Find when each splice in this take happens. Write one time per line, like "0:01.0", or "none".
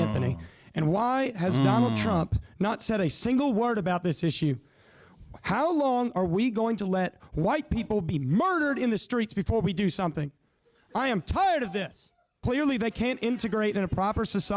0:12.4